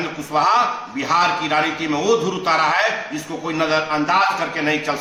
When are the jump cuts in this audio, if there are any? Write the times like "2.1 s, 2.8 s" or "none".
none

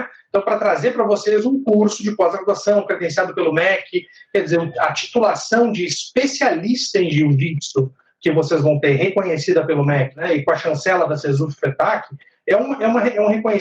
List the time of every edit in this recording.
10.2 s

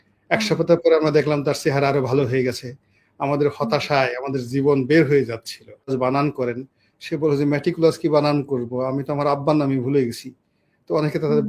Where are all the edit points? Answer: 5.9 s

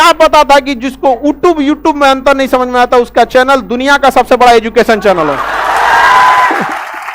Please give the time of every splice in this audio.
none

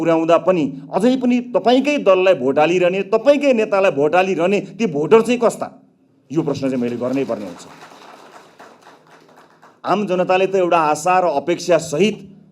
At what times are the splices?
none

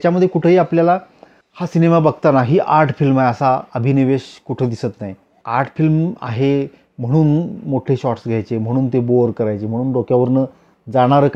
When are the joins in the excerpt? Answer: 5.4 s

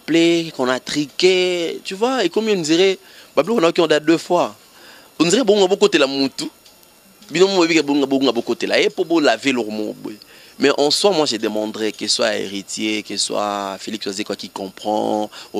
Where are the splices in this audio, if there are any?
none

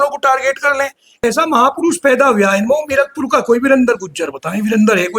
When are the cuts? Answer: 1.2 s

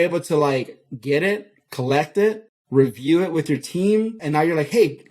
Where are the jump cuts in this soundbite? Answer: 2.5 s, 4.2 s

